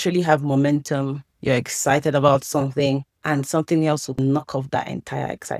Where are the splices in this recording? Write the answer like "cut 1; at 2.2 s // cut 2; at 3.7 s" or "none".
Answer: none